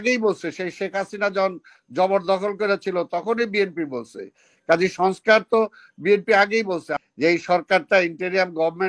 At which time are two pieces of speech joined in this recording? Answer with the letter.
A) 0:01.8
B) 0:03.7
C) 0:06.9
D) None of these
C